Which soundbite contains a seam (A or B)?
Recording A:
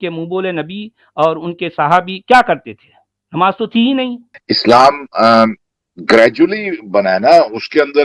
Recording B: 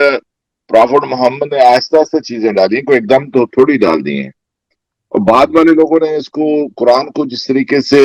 A